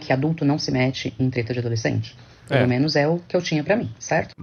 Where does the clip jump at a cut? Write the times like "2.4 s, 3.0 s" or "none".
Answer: none